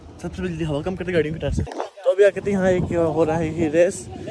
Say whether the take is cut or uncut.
cut